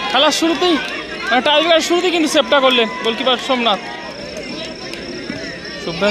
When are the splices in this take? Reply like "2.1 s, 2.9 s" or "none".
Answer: 4.1 s